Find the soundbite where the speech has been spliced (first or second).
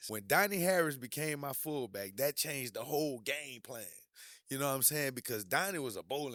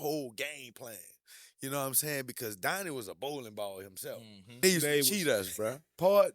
second